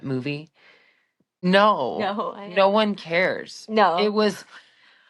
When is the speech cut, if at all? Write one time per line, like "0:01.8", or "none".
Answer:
0:01.2